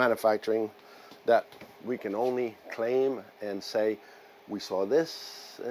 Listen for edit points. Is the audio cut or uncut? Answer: uncut